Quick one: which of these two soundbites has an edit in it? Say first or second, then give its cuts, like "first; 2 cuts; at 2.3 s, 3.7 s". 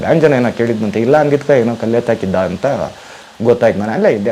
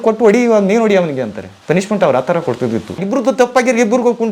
second; 2 cuts; at 1.5 s, 3.0 s